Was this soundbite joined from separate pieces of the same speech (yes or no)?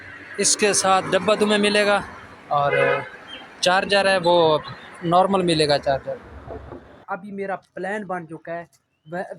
yes